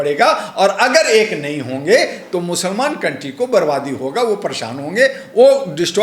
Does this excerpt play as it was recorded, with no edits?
yes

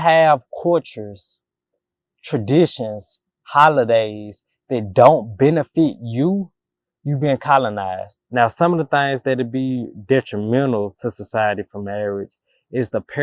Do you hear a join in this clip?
yes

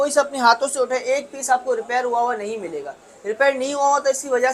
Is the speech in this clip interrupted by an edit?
no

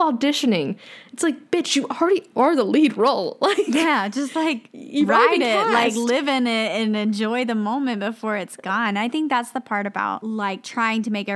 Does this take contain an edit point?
no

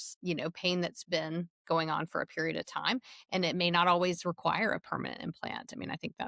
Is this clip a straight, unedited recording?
yes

